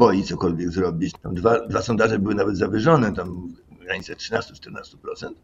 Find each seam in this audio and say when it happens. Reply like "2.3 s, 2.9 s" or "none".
1.2 s